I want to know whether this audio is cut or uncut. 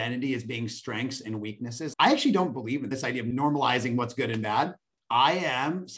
cut